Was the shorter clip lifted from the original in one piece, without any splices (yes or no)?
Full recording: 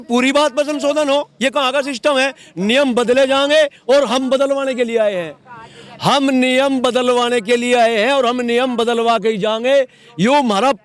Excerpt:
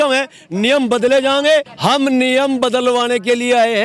no